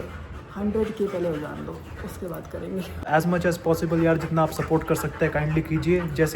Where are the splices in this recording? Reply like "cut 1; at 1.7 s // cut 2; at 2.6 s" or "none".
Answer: cut 1; at 3.0 s